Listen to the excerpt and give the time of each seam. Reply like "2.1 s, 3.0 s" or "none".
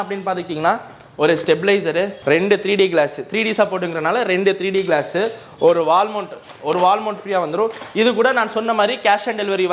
none